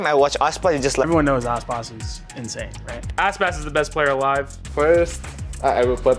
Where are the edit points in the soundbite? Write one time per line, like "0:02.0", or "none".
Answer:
0:01.0